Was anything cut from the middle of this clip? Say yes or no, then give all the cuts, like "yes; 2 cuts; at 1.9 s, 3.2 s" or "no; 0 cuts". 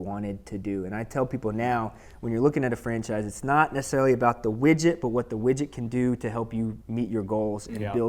yes; 1 cut; at 6.8 s